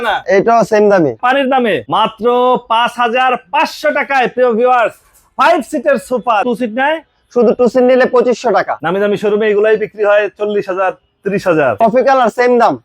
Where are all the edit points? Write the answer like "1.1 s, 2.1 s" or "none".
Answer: 1.4 s, 6.4 s, 8.8 s, 11.8 s